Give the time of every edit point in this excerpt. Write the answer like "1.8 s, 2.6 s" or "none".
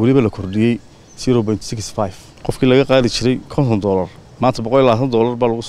2.3 s